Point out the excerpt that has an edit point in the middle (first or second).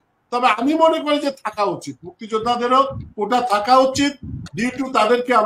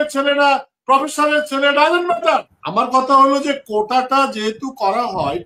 second